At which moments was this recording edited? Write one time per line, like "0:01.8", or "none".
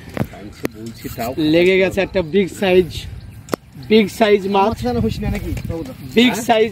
none